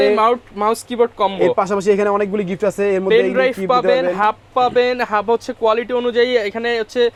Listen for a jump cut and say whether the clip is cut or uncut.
uncut